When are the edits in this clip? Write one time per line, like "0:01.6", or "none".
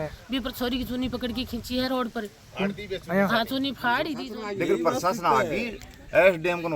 0:04.2